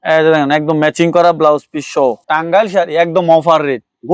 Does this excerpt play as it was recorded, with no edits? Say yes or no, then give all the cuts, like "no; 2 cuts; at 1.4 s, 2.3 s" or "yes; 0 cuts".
no; 1 cut; at 2.2 s